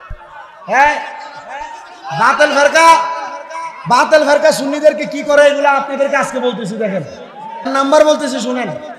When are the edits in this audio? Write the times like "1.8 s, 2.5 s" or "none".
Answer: 7.7 s